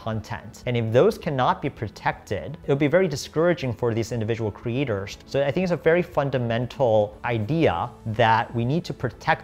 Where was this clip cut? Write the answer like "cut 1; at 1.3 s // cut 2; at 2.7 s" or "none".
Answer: cut 1; at 2.5 s // cut 2; at 5.1 s // cut 3; at 8.0 s